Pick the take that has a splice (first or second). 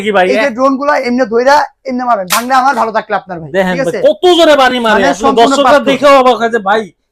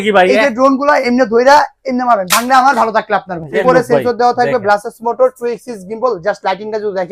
second